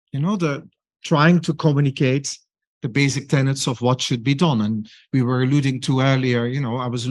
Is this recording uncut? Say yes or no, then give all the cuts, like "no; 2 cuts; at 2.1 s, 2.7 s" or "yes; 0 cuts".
yes; 0 cuts